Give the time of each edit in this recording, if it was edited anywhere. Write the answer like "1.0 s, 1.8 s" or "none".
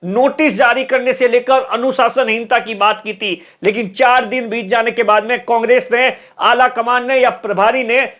none